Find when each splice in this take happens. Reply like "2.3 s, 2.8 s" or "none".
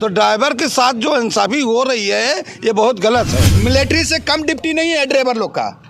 3.4 s